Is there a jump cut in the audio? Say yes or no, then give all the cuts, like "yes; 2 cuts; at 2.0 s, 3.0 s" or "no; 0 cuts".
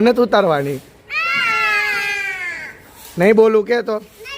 no; 0 cuts